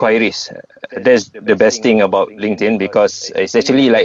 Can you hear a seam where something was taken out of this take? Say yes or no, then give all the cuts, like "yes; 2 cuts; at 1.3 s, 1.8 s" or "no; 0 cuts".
no; 0 cuts